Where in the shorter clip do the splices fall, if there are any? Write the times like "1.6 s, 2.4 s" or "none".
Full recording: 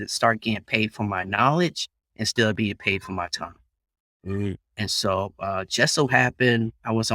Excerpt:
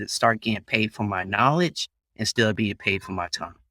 none